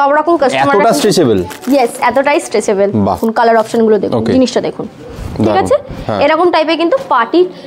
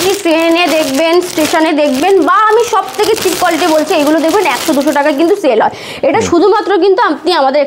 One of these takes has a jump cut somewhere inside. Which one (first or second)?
first